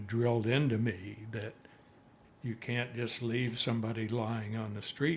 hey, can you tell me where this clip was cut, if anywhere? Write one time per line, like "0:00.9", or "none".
none